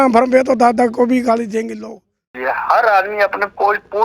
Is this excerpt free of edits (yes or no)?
no